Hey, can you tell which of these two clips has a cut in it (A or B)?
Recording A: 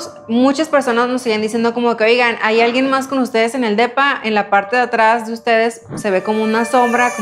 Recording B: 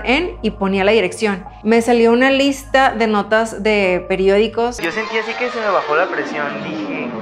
B